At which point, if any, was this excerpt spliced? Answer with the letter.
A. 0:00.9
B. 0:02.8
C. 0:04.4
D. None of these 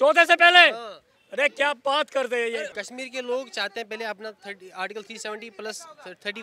B